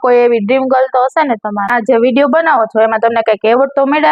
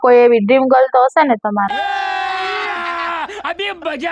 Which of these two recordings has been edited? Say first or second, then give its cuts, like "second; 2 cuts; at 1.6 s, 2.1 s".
first; 1 cut; at 1.7 s